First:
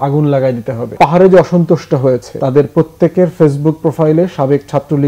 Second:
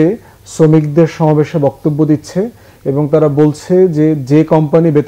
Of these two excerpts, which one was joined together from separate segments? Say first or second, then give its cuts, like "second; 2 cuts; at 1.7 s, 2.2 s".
first; 2 cuts; at 0.9 s, 2.3 s